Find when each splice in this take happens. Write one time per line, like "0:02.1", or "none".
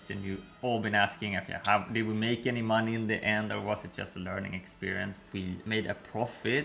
0:05.2